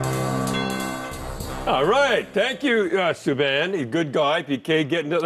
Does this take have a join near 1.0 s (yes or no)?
yes